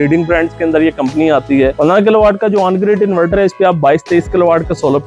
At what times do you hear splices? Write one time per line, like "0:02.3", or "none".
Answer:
none